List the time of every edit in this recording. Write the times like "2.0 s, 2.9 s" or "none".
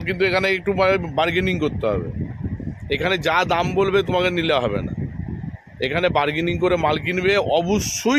none